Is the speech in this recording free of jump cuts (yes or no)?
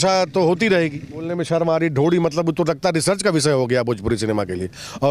no